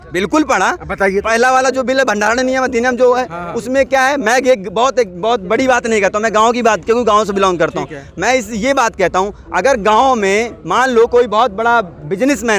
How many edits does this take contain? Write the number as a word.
zero